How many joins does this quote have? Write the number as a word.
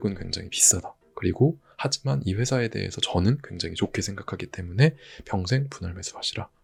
zero